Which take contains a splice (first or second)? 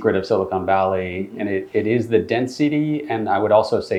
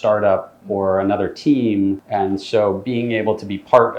second